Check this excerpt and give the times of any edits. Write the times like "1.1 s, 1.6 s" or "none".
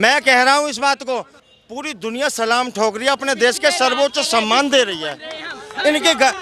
1.5 s